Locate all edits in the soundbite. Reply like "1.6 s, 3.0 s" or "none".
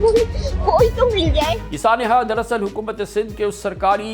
1.6 s